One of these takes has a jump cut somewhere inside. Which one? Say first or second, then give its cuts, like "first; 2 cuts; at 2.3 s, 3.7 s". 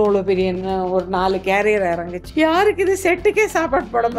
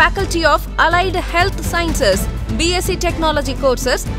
first; 1 cut; at 2.2 s